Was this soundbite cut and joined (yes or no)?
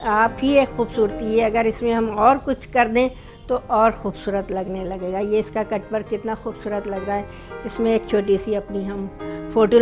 no